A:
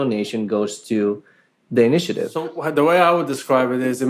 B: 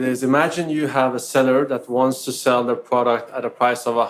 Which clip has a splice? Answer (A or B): A